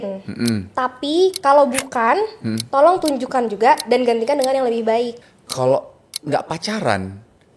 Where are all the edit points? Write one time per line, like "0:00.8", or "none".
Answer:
0:05.3